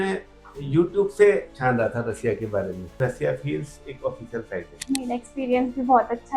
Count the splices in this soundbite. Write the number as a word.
two